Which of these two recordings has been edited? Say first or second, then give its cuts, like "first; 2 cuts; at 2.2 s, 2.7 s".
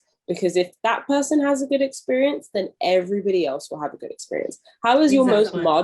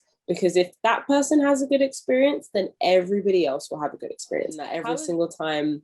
second; 1 cut; at 4.7 s